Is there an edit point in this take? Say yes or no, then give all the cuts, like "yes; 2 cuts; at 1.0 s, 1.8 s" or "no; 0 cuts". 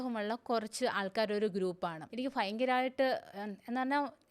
yes; 1 cut; at 2.1 s